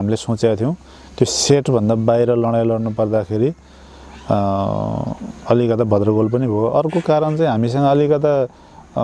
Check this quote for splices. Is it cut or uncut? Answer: uncut